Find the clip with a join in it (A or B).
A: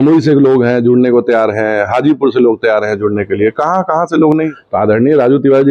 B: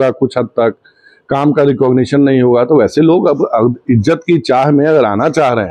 A